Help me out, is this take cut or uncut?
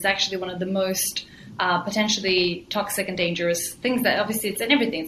uncut